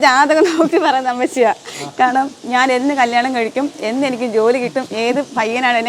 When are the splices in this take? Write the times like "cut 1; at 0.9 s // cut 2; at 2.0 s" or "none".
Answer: none